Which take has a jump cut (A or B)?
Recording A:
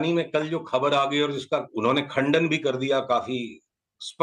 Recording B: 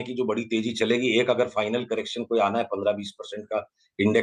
A